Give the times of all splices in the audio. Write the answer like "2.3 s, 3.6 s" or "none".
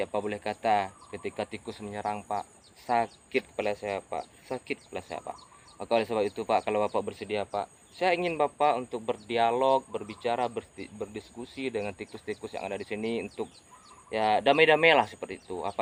none